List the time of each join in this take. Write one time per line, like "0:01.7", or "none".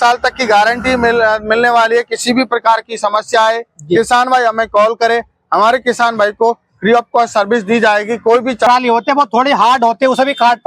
0:08.7